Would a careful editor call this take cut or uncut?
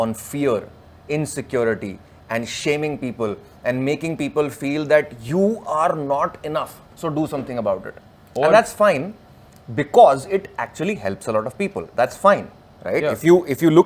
uncut